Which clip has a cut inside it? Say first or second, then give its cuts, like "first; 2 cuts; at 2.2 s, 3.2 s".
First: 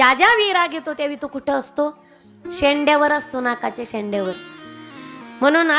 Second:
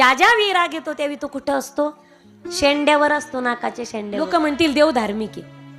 second; 1 cut; at 4.3 s